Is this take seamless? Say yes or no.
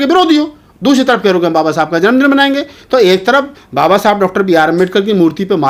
yes